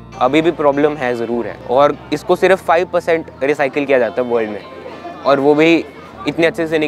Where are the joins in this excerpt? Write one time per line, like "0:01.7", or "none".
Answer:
0:01.5